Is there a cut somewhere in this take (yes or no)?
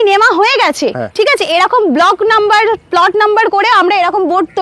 no